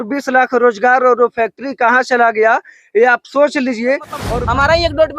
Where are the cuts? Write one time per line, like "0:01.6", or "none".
0:04.2